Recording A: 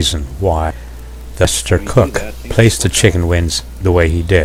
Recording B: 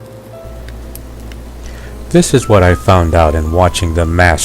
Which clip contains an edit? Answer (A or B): B